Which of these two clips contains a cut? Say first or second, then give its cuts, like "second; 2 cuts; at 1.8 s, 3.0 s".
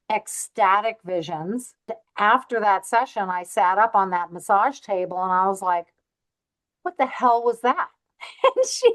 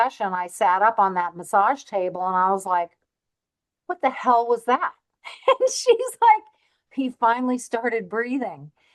first; 1 cut; at 2.0 s